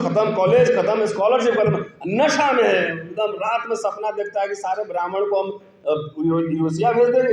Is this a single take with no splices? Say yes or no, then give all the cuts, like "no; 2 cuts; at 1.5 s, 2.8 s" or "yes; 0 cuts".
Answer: yes; 0 cuts